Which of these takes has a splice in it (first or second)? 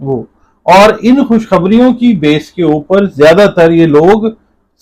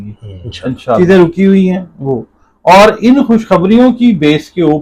second